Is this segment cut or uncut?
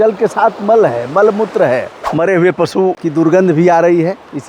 cut